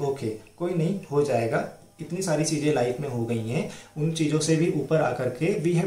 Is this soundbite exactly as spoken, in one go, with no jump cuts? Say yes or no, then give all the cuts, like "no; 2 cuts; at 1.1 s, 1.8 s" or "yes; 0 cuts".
yes; 0 cuts